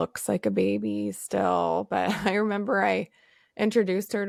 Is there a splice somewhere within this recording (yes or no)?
no